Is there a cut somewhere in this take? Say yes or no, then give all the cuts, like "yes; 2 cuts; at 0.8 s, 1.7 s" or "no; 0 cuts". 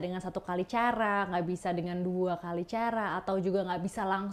no; 0 cuts